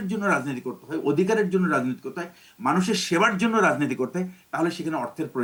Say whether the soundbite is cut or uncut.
uncut